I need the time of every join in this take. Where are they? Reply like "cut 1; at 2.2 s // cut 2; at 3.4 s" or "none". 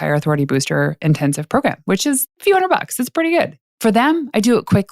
cut 1; at 3.6 s